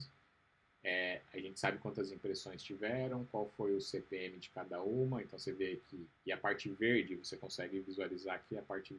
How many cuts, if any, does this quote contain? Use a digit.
0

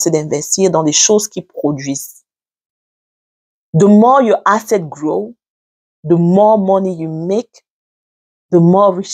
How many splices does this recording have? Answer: 0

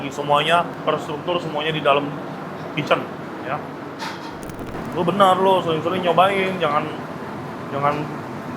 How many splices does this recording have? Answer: 1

